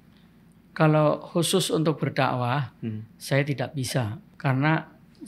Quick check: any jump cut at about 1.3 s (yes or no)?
no